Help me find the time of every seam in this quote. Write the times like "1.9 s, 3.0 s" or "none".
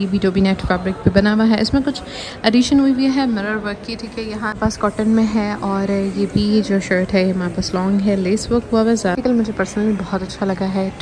4.5 s, 9.2 s

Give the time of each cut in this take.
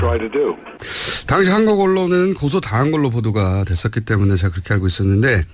none

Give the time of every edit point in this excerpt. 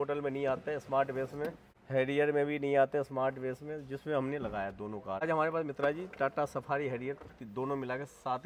1.7 s, 5.2 s

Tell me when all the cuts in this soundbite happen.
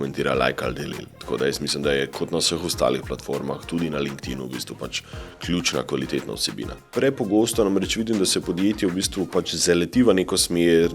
6.7 s

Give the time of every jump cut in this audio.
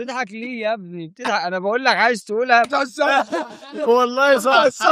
2.7 s

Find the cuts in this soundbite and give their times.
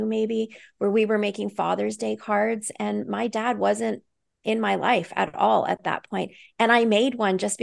none

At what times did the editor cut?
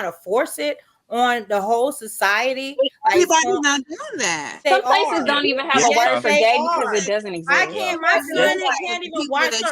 4.6 s

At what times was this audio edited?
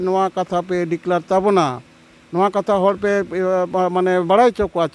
none

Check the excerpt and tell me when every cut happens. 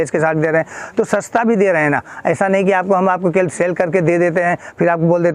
none

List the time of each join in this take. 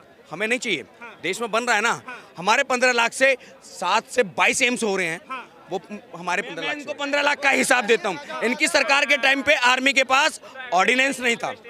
6.8 s

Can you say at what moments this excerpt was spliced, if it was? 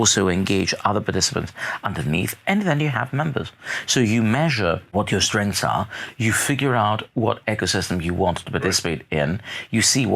4.9 s

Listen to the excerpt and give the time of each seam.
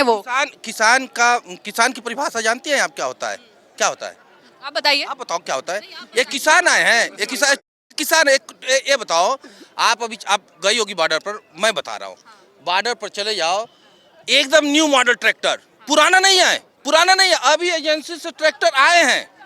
none

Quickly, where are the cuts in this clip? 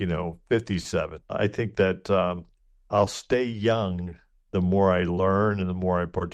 1.3 s

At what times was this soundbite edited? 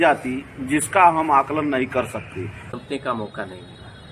2.6 s

